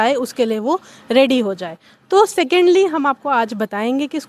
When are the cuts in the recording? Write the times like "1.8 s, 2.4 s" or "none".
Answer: none